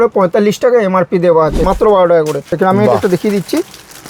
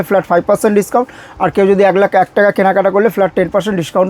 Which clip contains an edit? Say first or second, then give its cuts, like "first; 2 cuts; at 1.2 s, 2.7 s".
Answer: first; 2 cuts; at 1.7 s, 2.5 s